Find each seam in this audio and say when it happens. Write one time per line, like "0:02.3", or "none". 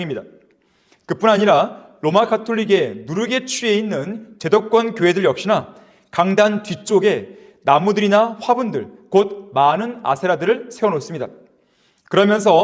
none